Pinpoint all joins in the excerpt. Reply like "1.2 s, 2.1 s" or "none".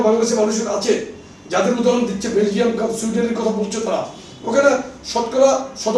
none